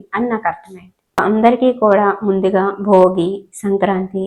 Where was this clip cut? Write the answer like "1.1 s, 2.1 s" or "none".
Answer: 1.2 s